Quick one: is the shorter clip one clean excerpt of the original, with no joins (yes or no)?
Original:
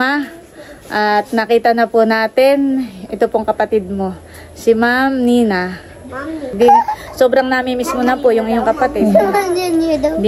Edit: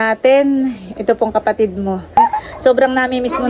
no